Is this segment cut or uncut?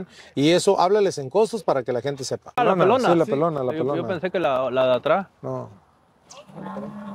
cut